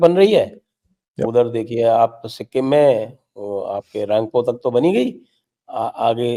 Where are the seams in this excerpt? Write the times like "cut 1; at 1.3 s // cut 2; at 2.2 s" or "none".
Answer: none